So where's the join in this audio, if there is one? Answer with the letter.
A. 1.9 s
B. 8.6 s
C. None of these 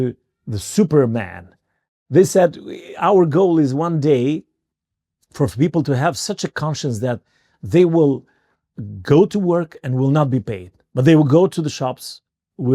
A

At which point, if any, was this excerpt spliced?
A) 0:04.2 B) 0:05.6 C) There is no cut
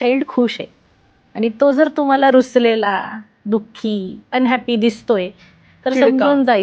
A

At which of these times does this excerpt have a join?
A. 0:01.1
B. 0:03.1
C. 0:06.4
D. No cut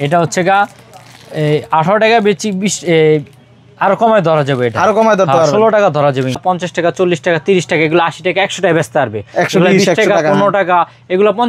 C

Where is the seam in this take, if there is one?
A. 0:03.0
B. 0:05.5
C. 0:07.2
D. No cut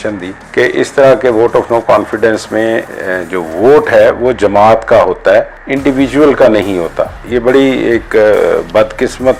C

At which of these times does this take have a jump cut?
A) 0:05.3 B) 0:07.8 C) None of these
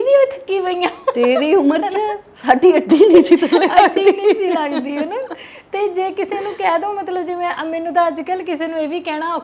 C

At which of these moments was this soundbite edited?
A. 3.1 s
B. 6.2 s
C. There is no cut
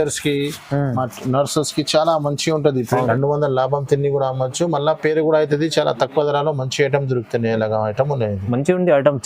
A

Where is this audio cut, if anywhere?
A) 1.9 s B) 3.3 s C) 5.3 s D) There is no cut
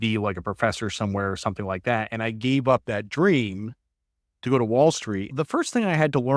C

